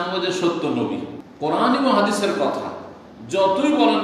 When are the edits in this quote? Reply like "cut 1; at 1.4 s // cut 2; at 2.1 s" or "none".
cut 1; at 1.2 s